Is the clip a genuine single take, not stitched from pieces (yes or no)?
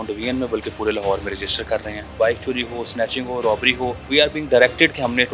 no